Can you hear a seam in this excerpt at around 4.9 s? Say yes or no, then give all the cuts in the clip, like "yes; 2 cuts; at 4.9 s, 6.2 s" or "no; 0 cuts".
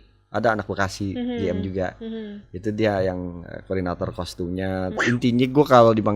yes; 1 cut; at 4.9 s